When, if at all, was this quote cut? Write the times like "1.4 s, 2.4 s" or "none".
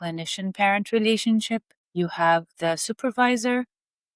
1.8 s